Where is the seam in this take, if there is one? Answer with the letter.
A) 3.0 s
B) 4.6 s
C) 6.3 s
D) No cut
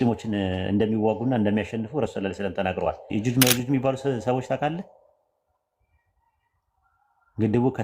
A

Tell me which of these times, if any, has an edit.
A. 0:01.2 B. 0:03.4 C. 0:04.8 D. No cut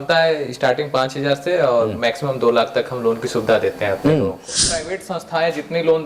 C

